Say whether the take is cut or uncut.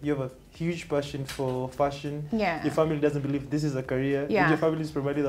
uncut